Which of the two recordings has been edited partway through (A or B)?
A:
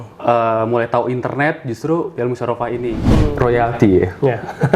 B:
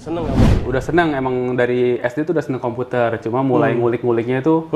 A